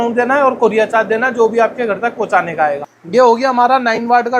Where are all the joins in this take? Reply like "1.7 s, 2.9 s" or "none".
2.9 s